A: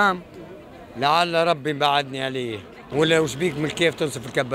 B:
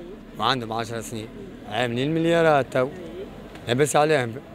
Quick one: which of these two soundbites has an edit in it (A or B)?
A